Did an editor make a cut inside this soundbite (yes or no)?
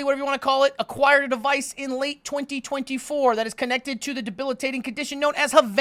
no